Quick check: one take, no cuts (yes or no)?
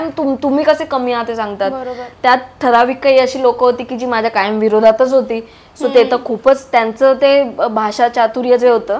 yes